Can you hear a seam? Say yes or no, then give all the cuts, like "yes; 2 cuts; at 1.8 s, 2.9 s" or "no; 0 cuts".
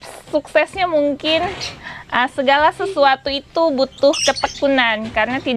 no; 0 cuts